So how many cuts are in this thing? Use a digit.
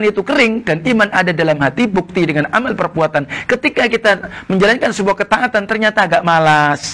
0